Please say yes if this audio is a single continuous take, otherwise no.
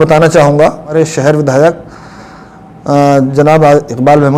no